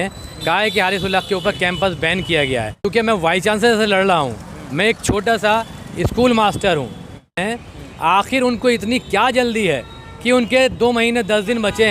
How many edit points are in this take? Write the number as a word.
two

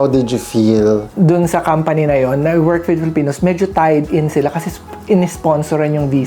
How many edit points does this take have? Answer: one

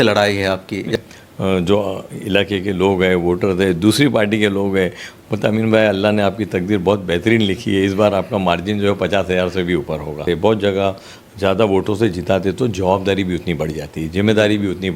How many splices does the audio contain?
two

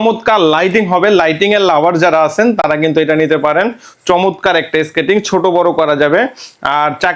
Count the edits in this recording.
zero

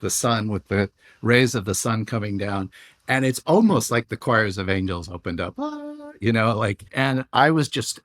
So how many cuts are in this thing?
one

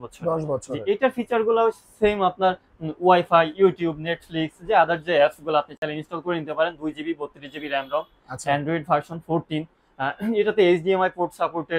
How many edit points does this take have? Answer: zero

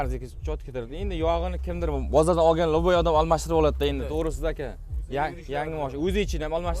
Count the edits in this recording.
zero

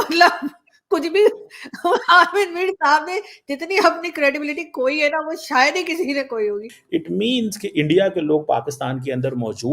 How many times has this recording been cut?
one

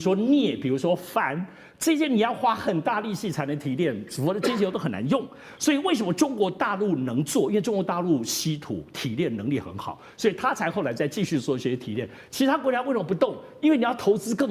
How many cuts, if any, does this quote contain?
zero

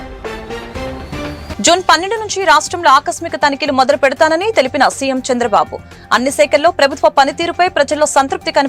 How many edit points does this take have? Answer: one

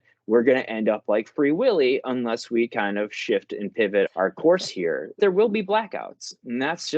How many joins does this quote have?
two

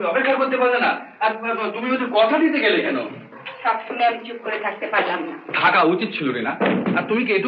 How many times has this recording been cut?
zero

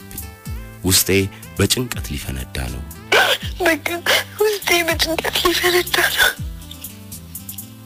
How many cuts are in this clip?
zero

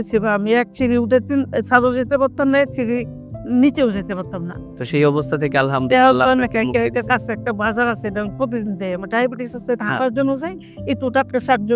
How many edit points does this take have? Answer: zero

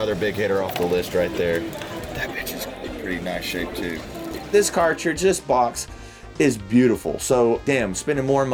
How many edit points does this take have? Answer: zero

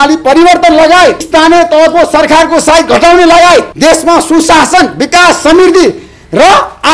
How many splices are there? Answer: zero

